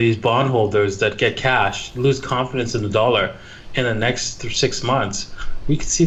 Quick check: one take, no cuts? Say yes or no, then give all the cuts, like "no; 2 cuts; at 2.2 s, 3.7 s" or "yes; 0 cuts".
yes; 0 cuts